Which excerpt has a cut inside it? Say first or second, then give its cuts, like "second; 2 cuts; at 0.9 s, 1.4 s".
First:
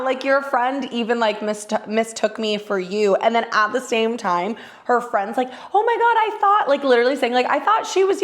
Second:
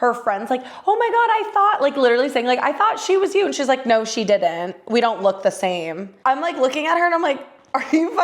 second; 1 cut; at 6.0 s